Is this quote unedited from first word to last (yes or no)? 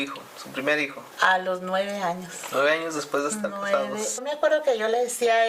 no